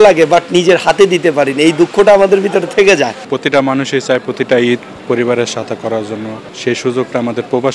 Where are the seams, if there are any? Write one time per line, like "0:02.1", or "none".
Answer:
0:03.2
0:06.4